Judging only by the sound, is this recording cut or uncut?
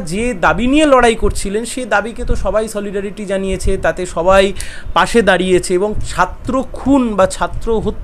uncut